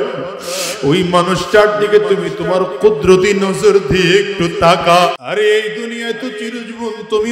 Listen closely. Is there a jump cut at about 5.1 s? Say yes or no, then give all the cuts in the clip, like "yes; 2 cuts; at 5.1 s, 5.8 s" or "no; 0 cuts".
yes; 1 cut; at 5.1 s